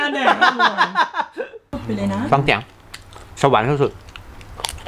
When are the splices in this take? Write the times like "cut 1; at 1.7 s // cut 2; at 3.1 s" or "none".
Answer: cut 1; at 1.7 s